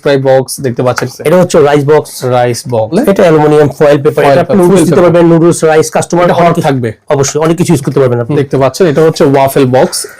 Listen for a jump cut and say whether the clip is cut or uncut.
cut